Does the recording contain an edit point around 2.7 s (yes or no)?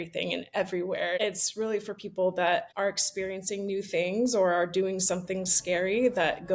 yes